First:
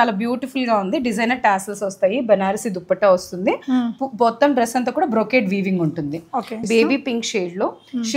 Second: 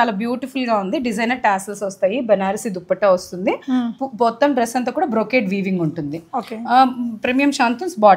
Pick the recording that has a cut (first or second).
first